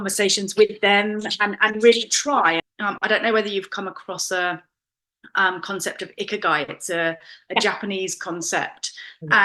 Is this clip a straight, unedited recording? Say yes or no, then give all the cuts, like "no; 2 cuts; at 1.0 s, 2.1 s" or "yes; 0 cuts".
no; 1 cut; at 2.7 s